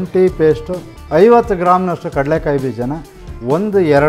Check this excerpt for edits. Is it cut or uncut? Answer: cut